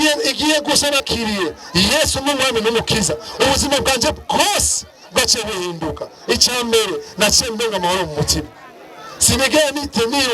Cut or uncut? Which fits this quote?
cut